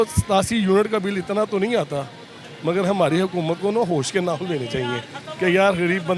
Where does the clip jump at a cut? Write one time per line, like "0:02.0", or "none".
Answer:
none